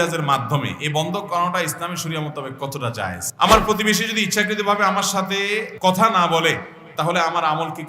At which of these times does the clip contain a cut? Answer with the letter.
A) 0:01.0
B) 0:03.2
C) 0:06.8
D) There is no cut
B